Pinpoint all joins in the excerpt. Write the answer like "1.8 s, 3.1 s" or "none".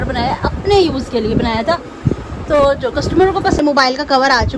3.6 s